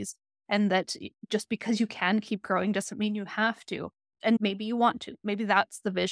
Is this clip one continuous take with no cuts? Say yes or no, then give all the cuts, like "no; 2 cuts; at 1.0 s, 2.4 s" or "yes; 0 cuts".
yes; 0 cuts